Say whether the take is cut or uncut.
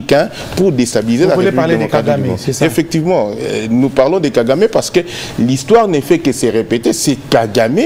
uncut